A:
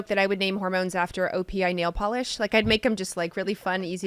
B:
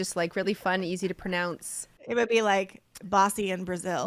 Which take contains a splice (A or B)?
B